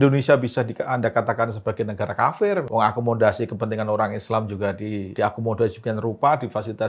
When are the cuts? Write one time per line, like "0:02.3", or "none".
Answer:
0:02.7
0:05.1